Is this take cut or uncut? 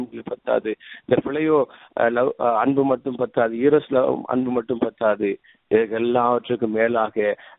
uncut